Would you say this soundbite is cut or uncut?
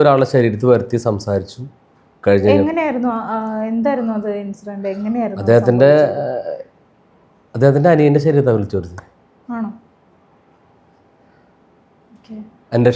uncut